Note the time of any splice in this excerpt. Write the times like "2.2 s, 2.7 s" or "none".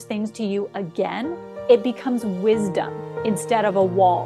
1.5 s, 3.2 s